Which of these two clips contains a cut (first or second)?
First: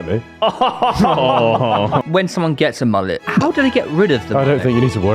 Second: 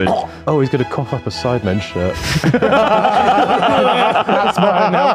first